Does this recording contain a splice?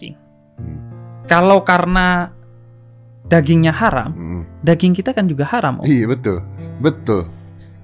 no; 0 cuts

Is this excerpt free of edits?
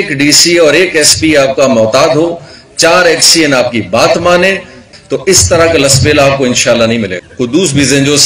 no; 2 cuts; at 4.9 s, 7.2 s

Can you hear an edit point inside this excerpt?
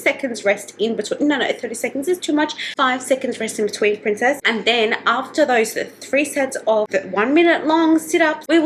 no; 0 cuts

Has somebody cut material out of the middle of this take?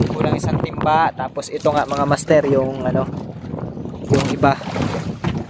no; 0 cuts

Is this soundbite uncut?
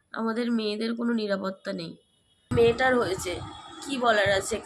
no; 1 cut; at 2.5 s

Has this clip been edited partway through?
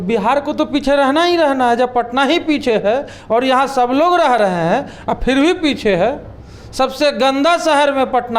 no; 0 cuts

